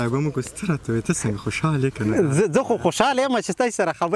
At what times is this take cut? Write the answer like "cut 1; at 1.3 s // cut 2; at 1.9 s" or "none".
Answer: none